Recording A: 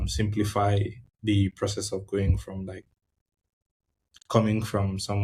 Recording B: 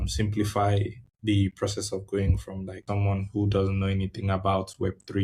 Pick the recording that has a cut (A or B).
B